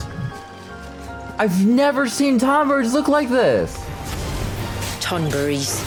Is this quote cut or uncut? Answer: uncut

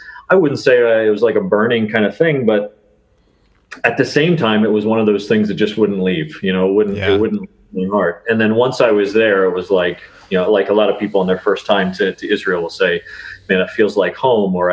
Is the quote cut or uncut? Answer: uncut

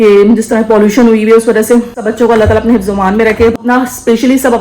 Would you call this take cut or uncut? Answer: cut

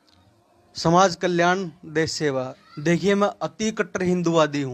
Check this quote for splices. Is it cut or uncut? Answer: cut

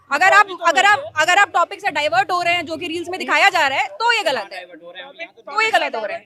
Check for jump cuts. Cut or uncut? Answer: uncut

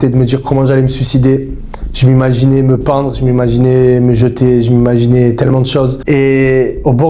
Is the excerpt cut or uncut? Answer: cut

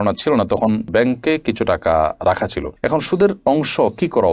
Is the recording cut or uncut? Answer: uncut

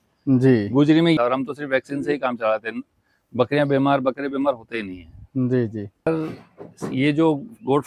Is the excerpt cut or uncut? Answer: cut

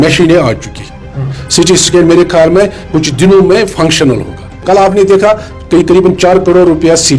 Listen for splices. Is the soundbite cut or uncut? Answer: cut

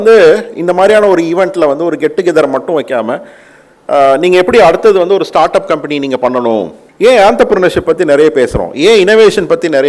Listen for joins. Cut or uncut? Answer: cut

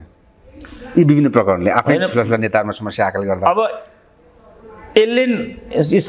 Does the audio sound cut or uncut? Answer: uncut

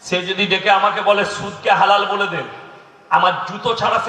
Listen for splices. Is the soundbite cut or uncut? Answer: uncut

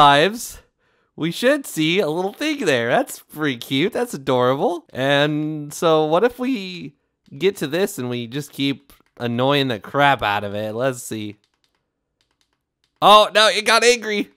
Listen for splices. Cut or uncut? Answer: uncut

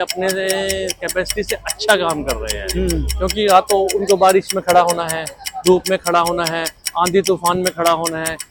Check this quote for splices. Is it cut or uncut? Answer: uncut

